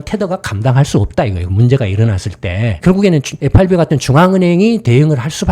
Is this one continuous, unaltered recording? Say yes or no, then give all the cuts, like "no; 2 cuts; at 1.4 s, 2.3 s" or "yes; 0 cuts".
no; 1 cut; at 2.8 s